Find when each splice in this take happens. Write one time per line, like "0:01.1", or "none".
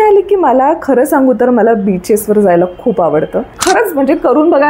0:03.5